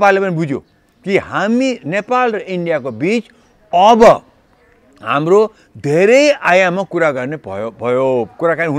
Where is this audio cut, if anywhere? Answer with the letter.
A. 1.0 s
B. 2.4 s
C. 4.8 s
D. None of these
D